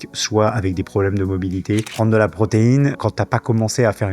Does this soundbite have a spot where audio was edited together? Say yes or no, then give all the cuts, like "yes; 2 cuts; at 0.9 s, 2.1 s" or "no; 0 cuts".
yes; 2 cuts; at 1.9 s, 3.0 s